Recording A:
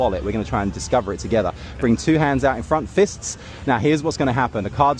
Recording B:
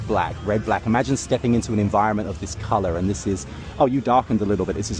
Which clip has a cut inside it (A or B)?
B